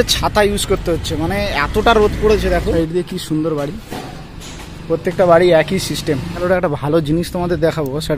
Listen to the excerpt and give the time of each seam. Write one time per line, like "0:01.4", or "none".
0:02.7
0:06.4